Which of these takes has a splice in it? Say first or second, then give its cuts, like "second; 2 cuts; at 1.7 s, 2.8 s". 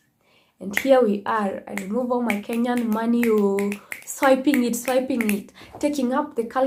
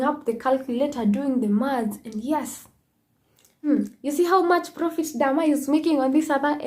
second; 1 cut; at 3.7 s